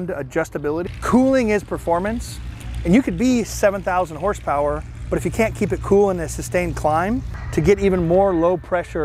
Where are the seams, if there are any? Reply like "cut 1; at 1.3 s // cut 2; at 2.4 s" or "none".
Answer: cut 1; at 0.9 s // cut 2; at 7.3 s